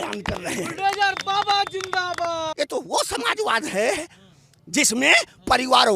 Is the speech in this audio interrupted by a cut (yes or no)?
yes